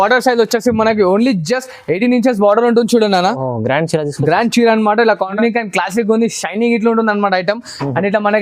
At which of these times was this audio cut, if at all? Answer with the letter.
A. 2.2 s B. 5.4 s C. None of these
B